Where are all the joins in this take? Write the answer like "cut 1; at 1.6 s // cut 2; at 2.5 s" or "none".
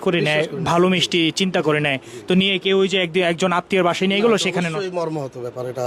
none